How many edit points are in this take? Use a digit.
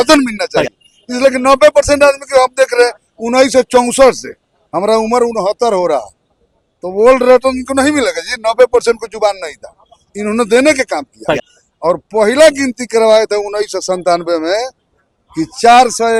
0